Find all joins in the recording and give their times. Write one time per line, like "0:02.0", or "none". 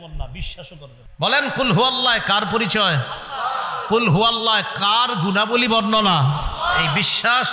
0:01.0